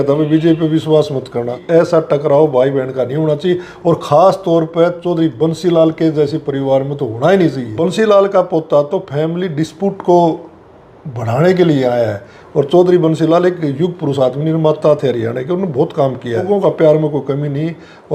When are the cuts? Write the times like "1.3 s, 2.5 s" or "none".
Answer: 1.6 s, 7.7 s, 12.3 s, 16.4 s